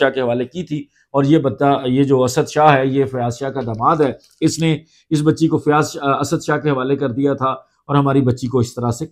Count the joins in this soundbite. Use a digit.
0